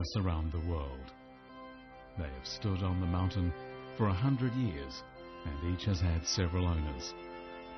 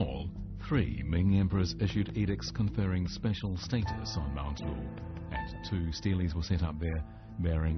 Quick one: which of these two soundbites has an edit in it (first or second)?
first